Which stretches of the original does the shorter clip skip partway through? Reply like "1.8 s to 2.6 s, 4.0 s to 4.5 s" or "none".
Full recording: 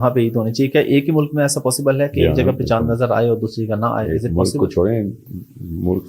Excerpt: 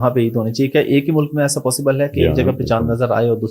none